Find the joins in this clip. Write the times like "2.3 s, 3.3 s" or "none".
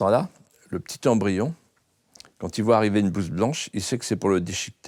none